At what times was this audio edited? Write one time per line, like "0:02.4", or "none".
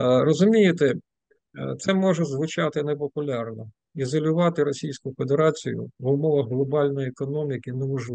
none